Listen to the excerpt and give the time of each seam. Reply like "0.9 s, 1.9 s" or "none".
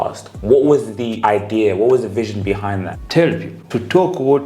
1.0 s, 2.9 s, 3.5 s